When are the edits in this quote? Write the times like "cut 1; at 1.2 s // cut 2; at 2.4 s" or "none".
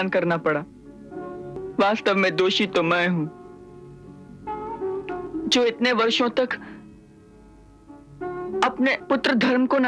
cut 1; at 1.6 s